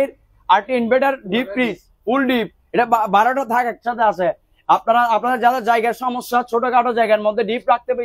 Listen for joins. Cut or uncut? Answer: uncut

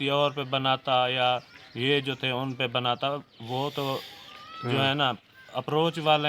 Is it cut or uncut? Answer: uncut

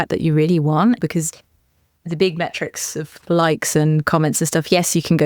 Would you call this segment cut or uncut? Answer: cut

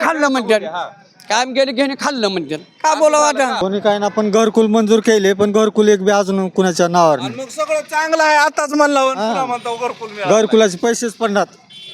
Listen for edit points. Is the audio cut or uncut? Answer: cut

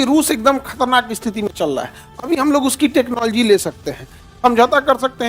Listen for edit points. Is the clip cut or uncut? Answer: uncut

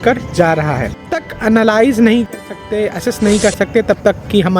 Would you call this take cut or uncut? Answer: cut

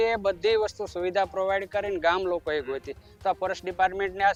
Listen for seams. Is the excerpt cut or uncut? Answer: uncut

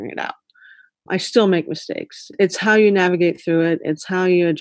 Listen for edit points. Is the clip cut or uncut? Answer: cut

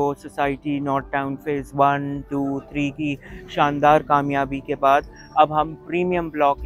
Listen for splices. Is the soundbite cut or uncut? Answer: uncut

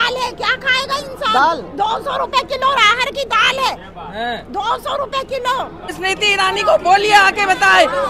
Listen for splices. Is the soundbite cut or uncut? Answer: cut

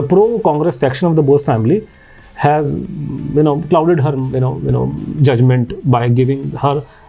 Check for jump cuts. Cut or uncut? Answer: uncut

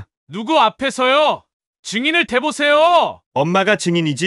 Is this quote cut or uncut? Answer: uncut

